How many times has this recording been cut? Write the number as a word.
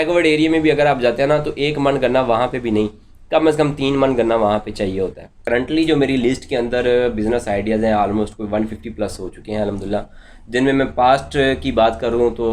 one